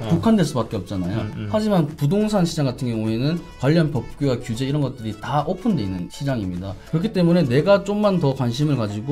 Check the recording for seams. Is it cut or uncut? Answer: cut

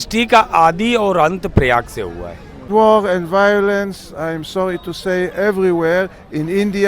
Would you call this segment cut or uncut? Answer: cut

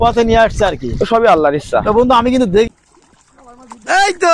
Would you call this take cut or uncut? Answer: cut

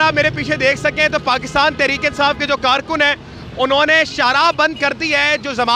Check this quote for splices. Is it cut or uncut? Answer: uncut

